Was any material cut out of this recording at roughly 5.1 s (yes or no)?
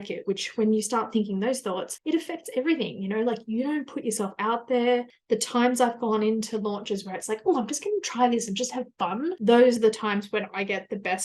yes